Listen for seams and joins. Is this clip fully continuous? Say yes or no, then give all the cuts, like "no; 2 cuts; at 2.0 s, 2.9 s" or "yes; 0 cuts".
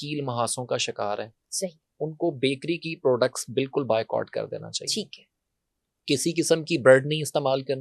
yes; 0 cuts